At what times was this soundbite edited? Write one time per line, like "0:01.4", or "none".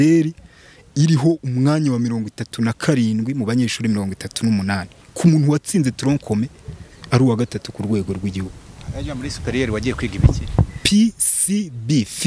none